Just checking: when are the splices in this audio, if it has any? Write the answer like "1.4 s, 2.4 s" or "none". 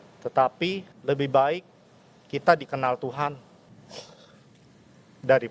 0.9 s, 3.7 s